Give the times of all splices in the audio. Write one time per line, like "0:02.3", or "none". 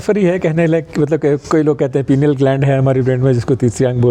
none